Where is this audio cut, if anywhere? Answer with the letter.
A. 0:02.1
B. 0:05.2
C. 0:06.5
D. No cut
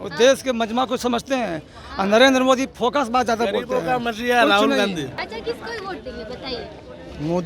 B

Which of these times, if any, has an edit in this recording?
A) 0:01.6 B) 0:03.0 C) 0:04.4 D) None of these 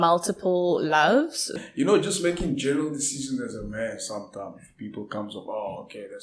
A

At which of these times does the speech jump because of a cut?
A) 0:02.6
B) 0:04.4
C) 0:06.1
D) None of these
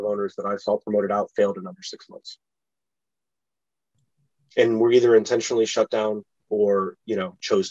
D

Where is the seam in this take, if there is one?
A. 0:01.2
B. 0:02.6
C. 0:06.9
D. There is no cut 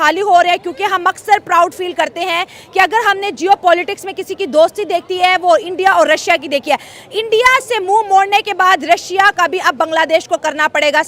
D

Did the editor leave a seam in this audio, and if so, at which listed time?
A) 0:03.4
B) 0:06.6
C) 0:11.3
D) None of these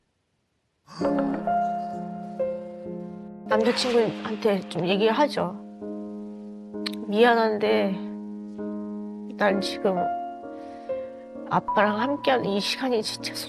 A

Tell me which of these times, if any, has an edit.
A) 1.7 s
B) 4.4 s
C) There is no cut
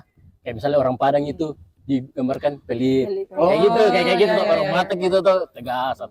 C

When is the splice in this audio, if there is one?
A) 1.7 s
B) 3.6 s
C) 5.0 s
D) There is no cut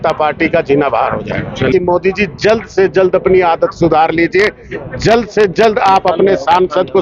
A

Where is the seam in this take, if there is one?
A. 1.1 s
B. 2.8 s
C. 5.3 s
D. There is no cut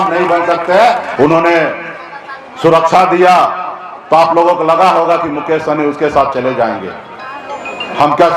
A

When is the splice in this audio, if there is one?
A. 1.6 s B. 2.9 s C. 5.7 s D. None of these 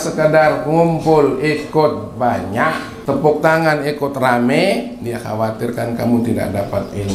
B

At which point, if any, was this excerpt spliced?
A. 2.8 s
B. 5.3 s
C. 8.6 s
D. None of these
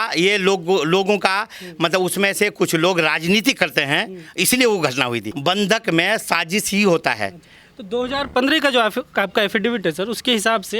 B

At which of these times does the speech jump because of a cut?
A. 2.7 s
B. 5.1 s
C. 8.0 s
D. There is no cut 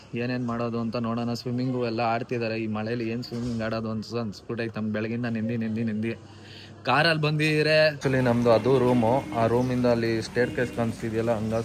C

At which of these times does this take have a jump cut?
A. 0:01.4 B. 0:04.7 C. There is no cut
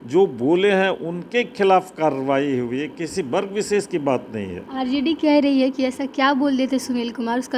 C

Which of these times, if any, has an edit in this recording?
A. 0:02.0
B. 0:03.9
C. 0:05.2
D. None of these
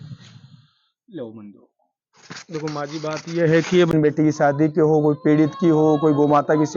B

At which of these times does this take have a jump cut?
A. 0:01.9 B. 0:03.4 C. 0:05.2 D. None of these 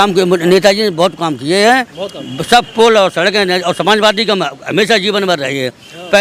D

